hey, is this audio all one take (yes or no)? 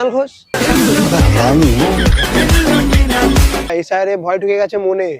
no